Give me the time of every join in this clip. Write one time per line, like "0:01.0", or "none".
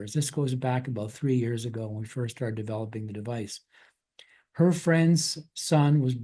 none